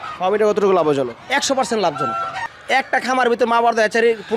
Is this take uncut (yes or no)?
no